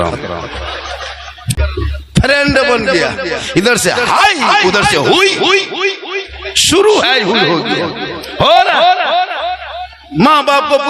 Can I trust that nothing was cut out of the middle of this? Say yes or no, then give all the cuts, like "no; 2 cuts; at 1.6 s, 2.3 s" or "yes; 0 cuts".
no; 1 cut; at 1.5 s